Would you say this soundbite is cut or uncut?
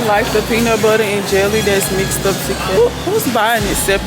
cut